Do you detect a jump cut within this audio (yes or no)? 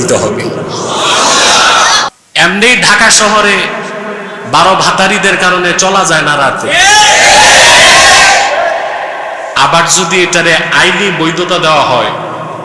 yes